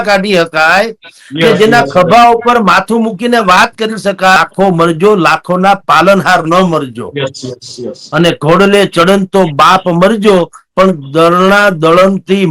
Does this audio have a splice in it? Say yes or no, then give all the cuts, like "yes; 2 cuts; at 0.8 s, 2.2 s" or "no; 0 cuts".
yes; 1 cut; at 4.4 s